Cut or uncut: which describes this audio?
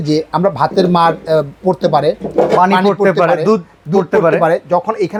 uncut